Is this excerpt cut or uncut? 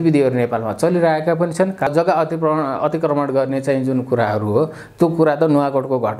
cut